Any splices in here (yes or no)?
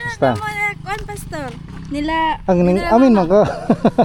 no